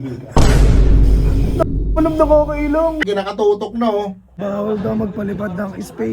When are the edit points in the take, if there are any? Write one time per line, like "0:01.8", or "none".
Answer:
0:03.0
0:04.3

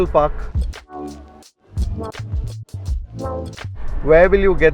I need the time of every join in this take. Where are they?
0:03.8

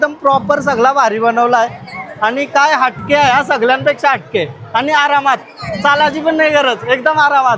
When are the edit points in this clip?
none

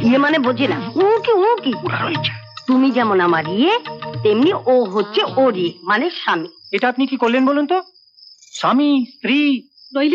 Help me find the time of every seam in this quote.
0:06.6

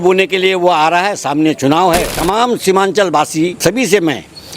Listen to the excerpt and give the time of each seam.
0:02.2
0:03.6

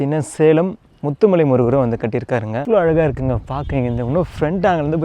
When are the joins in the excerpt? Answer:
0:02.5

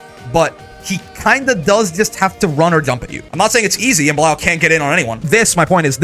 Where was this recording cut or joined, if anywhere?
0:03.2
0:05.2

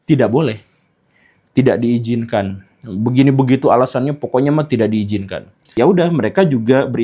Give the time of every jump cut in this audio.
0:05.7

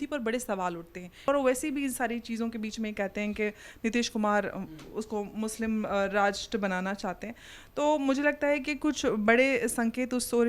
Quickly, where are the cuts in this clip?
0:01.3

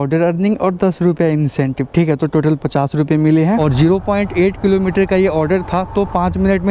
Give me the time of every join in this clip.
none

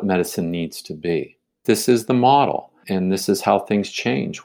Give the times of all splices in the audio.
0:01.5
0:02.8

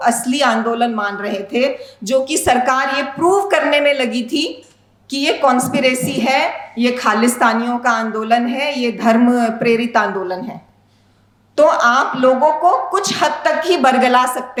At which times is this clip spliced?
none

